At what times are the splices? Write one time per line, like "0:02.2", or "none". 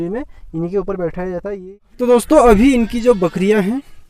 0:01.5